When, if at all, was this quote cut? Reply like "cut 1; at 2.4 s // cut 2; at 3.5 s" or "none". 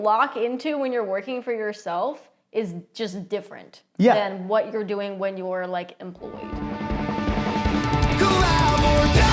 cut 1; at 6.6 s